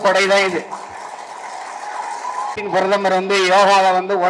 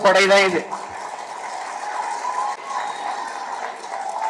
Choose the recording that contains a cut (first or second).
first